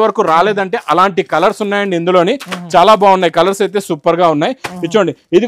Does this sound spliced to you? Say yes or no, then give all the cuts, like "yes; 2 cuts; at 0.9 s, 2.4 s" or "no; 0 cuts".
no; 0 cuts